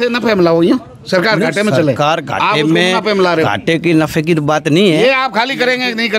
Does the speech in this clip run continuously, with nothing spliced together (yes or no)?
yes